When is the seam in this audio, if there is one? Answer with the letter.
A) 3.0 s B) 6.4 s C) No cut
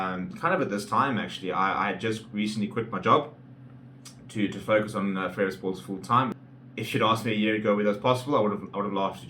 B